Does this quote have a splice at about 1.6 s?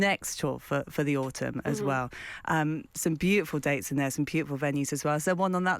no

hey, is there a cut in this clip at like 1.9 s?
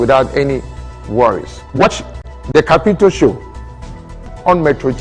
yes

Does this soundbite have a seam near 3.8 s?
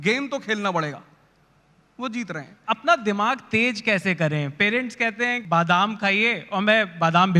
no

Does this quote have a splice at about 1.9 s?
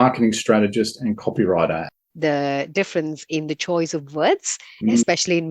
yes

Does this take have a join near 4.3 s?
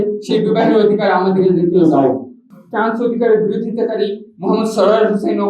no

